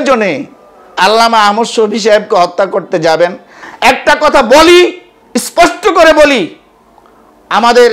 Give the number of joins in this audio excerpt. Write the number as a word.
one